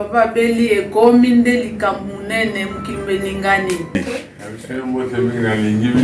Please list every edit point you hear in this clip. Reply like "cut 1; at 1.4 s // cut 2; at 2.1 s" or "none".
cut 1; at 4.0 s